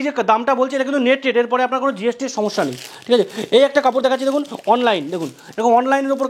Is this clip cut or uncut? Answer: uncut